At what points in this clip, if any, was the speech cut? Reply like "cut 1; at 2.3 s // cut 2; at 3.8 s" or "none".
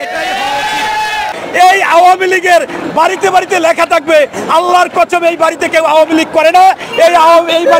cut 1; at 1.3 s